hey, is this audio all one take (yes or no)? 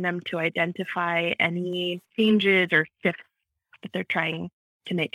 no